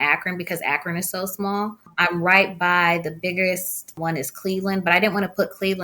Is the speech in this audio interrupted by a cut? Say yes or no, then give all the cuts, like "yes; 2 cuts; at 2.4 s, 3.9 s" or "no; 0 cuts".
yes; 2 cuts; at 1.9 s, 3.9 s